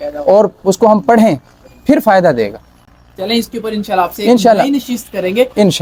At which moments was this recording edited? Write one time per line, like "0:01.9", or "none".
none